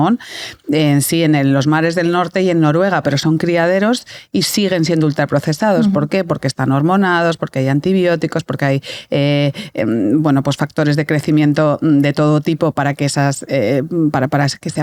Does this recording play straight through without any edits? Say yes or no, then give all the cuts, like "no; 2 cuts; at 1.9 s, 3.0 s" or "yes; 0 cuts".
yes; 0 cuts